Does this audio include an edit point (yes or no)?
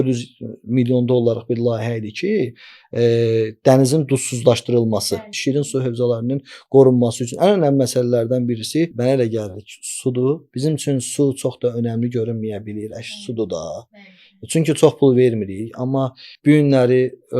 yes